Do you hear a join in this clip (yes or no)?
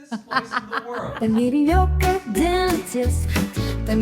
yes